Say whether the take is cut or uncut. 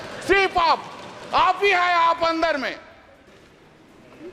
cut